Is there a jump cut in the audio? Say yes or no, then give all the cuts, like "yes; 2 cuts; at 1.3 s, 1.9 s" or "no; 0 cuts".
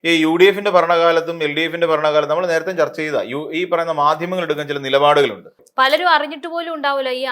yes; 1 cut; at 5.6 s